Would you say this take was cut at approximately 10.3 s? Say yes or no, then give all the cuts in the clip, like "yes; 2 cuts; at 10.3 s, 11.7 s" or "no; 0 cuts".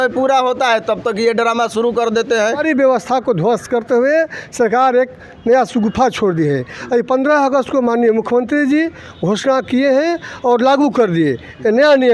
no; 1 cut; at 2.6 s